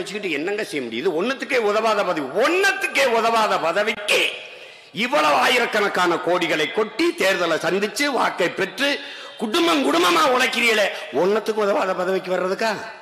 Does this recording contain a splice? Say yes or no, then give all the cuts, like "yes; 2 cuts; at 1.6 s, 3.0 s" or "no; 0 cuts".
no; 0 cuts